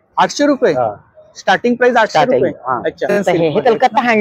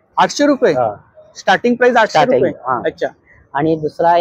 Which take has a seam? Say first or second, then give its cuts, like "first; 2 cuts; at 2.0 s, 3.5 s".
first; 1 cut; at 3.2 s